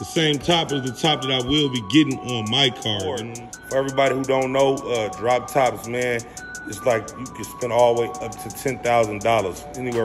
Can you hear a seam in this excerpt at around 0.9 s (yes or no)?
no